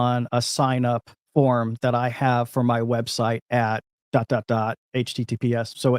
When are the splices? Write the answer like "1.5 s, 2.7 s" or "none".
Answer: 1.1 s, 3.9 s